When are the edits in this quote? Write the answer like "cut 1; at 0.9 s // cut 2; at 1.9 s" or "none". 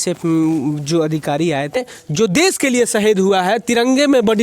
cut 1; at 1.8 s